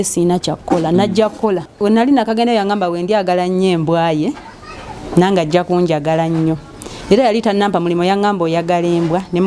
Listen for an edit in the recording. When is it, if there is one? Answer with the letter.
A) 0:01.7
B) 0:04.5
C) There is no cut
A